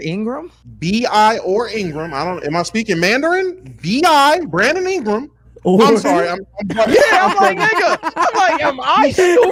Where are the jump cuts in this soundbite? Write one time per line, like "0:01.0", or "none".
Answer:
none